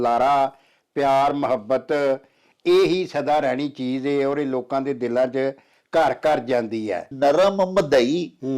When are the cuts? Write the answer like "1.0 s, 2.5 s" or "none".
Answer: 7.1 s